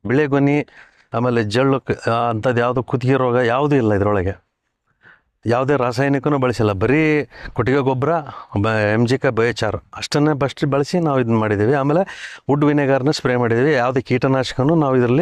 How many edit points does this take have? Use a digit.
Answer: 0